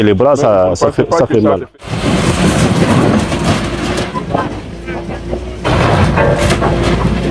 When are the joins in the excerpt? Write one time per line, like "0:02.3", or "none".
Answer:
0:01.7